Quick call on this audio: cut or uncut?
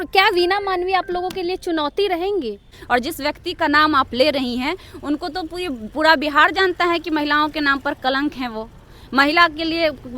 cut